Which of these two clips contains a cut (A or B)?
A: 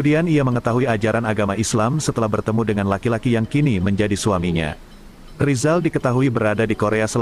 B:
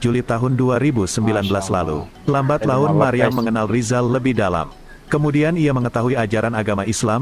B